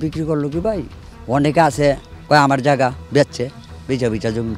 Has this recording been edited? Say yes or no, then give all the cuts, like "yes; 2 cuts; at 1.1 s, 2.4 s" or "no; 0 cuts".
no; 0 cuts